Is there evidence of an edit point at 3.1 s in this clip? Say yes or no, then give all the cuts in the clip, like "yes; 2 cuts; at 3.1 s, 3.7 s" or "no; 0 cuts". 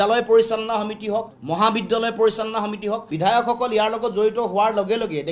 yes; 1 cut; at 3.1 s